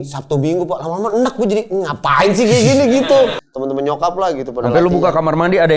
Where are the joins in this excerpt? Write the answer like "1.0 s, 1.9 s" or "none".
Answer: 3.4 s